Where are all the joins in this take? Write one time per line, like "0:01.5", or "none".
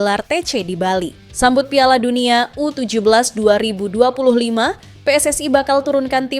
0:01.2